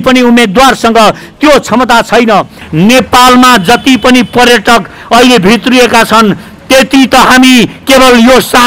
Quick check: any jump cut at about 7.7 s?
no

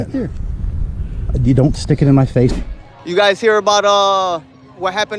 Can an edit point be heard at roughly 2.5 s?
yes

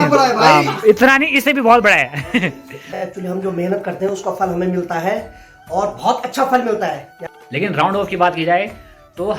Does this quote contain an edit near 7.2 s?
yes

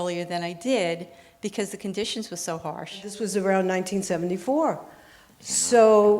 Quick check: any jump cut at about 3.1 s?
yes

